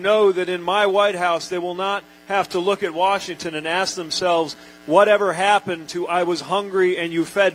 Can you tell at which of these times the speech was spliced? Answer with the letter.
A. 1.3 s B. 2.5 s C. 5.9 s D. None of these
D